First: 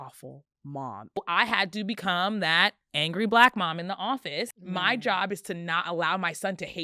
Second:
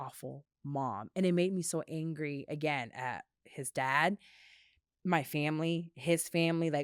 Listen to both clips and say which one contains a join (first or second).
first